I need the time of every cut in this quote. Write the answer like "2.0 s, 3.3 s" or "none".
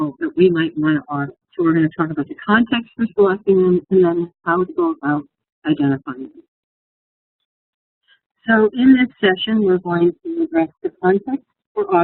4.0 s